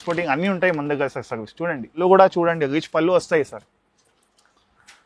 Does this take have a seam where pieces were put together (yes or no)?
yes